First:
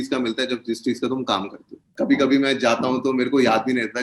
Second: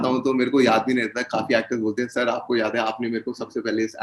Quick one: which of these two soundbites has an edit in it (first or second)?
first